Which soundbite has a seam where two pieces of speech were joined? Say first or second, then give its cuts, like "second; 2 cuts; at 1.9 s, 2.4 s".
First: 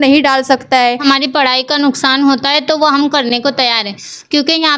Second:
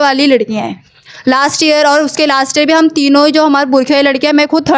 first; 1 cut; at 1.0 s